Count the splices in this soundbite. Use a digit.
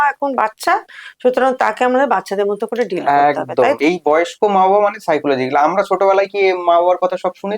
1